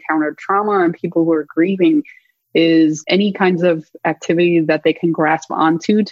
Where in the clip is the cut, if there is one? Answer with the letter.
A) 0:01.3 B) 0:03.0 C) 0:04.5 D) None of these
B